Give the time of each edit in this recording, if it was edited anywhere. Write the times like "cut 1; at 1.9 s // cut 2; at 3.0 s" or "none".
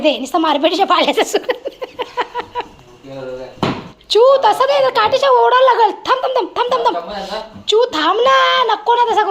cut 1; at 4.0 s